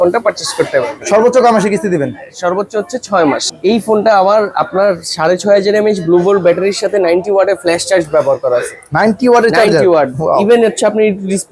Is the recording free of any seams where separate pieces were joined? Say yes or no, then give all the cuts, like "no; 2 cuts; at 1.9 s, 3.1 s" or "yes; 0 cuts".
no; 1 cut; at 3.5 s